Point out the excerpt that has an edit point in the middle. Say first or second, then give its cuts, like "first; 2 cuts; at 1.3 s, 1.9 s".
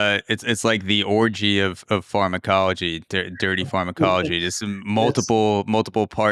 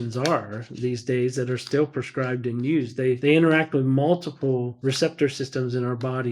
second; 2 cuts; at 3.2 s, 4.7 s